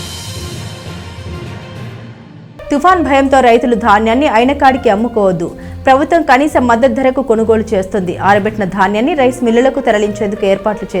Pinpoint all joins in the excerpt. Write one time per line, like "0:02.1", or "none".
0:02.1